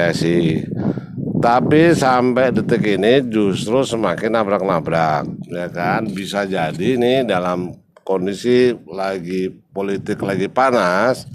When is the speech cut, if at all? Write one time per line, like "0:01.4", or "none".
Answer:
none